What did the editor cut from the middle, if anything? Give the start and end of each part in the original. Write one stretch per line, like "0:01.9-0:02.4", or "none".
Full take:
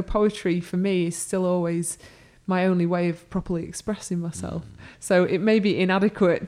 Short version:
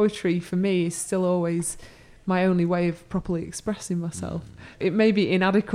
0:05.0-0:05.3